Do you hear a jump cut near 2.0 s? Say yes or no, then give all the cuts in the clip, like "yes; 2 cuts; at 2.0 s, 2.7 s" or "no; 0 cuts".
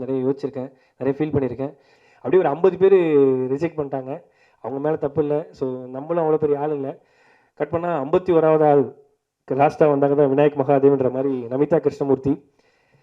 yes; 1 cut; at 2.0 s